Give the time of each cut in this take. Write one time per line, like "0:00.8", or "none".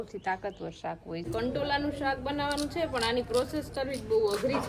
0:01.3